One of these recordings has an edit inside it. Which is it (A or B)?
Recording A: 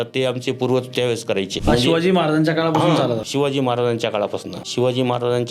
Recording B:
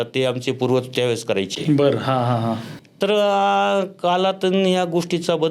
A